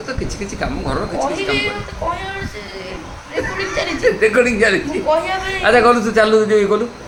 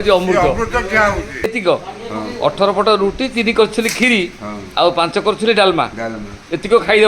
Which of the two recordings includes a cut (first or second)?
second